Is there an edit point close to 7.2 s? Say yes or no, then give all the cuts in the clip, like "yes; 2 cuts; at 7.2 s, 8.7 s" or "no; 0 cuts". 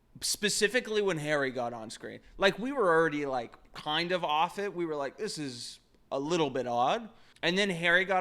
yes; 1 cut; at 7.2 s